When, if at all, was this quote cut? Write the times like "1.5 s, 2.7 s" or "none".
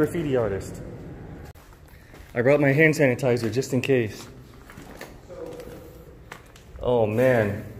1.5 s